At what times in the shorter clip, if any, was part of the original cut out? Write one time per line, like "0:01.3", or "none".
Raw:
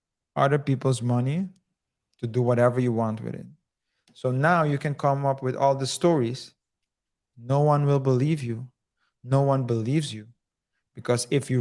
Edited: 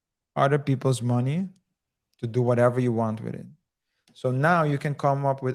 none